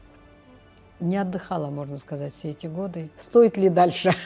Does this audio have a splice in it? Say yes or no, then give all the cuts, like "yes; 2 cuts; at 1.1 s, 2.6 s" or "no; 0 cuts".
yes; 1 cut; at 3.1 s